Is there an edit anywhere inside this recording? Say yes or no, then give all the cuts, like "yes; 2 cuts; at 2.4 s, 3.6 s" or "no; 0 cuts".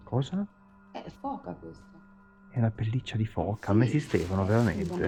no; 0 cuts